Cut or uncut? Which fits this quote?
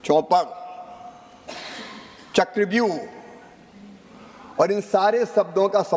uncut